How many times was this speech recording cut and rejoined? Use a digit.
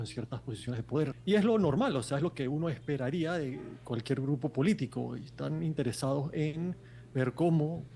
1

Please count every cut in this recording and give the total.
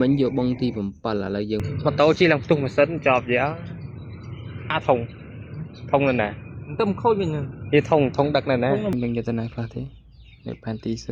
2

